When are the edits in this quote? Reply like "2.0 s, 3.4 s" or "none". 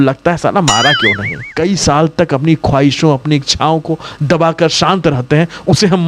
1.5 s

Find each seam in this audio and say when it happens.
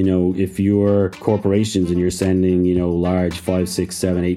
1.2 s

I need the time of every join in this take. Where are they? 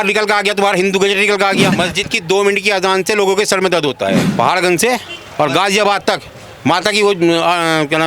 1.7 s, 4.3 s

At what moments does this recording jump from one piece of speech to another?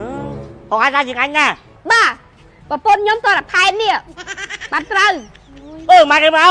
none

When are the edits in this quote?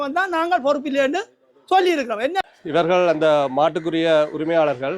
2.4 s

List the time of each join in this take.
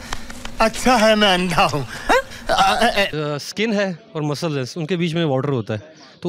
3.1 s

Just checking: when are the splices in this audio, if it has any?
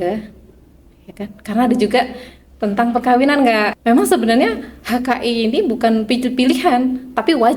3.7 s

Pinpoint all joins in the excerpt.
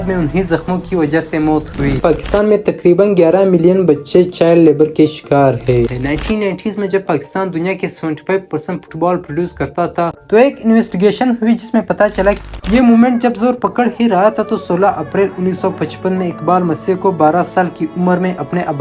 2.0 s, 5.9 s, 12.4 s

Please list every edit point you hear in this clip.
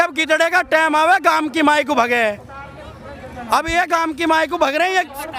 none

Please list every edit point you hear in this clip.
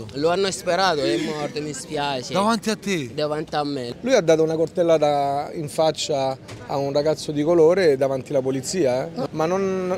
3.9 s, 9.2 s

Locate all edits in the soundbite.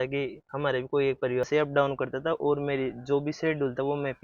1.5 s

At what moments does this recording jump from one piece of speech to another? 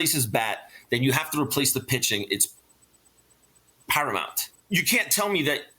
4.5 s

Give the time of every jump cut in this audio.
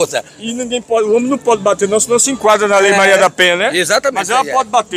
none

